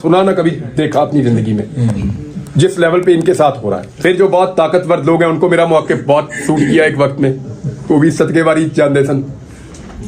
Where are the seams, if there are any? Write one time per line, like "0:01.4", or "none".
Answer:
0:03.9